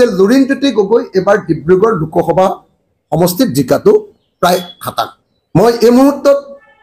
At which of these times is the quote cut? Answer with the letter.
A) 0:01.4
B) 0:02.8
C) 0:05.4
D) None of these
D